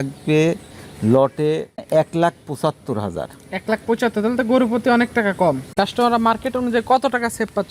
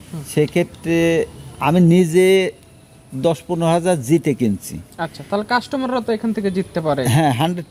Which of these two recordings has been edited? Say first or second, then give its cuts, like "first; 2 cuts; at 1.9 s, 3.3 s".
first; 2 cuts; at 1.9 s, 5.7 s